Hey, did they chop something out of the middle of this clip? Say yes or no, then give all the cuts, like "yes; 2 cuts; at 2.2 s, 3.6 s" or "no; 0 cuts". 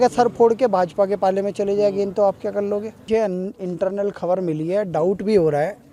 no; 0 cuts